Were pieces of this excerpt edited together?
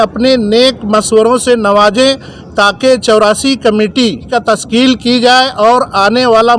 no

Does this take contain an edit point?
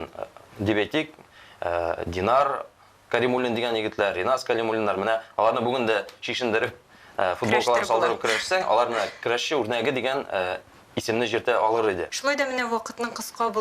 yes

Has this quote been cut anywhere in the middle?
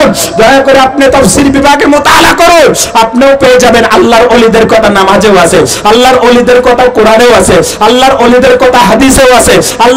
no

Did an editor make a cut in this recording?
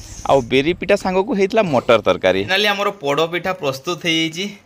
yes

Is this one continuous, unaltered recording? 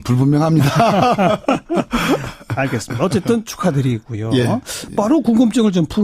yes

